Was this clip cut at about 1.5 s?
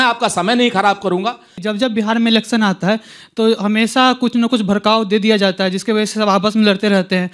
yes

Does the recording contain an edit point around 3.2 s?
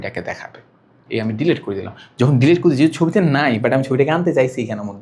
no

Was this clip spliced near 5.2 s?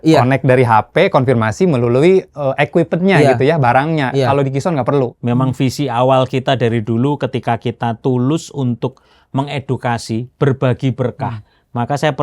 yes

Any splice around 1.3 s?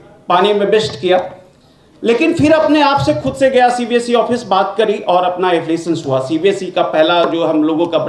no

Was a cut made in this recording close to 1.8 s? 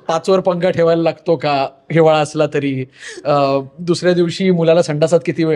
no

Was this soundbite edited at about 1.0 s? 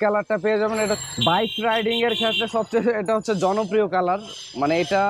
yes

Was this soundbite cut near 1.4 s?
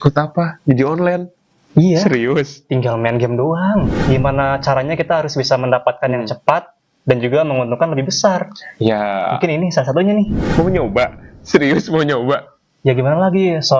no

